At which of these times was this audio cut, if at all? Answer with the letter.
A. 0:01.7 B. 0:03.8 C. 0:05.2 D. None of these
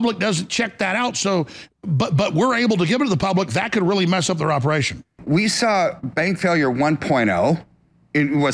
C